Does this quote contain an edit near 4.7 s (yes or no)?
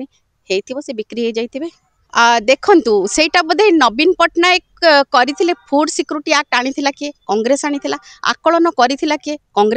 no